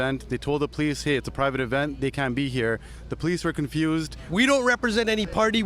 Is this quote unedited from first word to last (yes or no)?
no